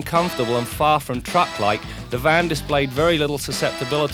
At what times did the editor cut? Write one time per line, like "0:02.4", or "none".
none